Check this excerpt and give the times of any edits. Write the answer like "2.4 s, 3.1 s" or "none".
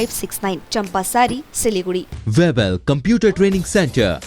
2.1 s

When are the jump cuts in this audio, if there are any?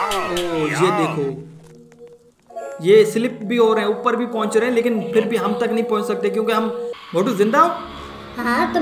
6.9 s

